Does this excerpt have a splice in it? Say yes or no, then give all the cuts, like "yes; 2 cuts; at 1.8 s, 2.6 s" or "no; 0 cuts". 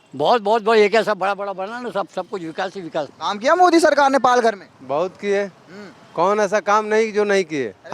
yes; 1 cut; at 3.1 s